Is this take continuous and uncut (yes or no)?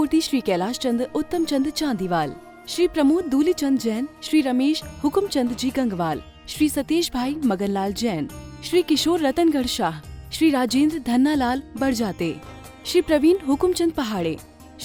yes